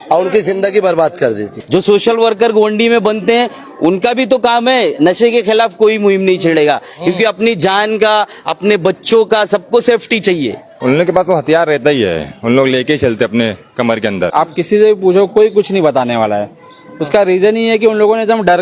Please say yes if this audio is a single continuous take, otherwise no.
no